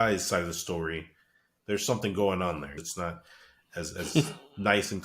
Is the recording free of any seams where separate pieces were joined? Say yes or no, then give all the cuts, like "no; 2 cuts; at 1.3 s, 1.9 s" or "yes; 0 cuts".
no; 2 cuts; at 1.6 s, 2.7 s